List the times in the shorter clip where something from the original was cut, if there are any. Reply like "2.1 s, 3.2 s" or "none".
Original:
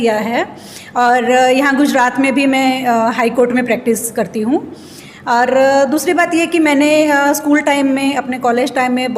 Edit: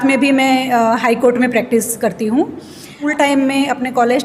3.0 s